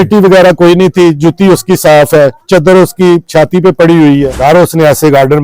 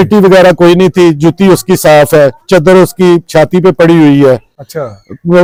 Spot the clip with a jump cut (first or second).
first